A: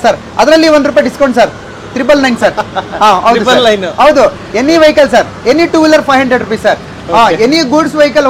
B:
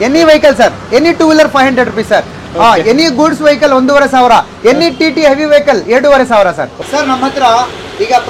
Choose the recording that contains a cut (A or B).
B